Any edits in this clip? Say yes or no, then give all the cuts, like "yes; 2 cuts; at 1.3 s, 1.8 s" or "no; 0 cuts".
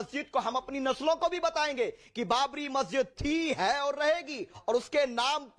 no; 0 cuts